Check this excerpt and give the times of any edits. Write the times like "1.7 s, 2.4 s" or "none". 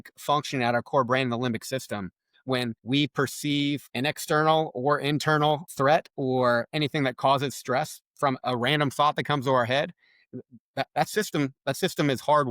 2.8 s, 3.9 s, 5.7 s